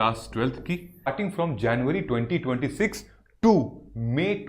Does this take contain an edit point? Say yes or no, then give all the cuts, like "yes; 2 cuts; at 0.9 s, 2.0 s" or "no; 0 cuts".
yes; 1 cut; at 1.1 s